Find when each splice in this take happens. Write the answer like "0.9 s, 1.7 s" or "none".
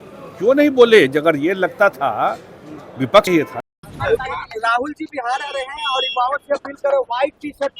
3.8 s